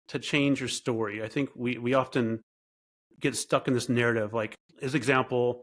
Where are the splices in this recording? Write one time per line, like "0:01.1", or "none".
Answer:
0:04.6